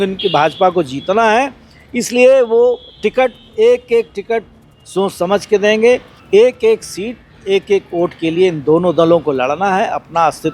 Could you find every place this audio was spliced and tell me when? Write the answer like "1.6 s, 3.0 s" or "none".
6.1 s